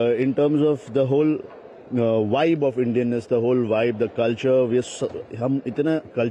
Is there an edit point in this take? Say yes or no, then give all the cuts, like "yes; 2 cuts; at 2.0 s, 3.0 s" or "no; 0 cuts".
no; 0 cuts